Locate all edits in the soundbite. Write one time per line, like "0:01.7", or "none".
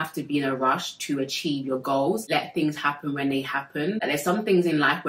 0:02.2
0:04.0